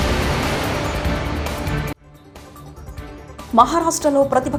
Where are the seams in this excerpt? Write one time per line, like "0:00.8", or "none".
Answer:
none